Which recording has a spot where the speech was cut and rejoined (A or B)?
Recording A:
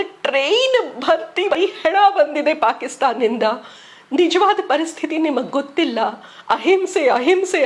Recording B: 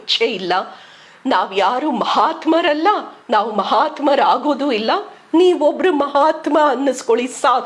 A